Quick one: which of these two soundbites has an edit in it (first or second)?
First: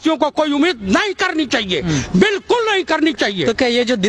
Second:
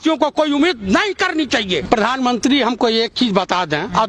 second